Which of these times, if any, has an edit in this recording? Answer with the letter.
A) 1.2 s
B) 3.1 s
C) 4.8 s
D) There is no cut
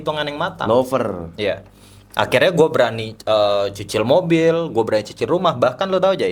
D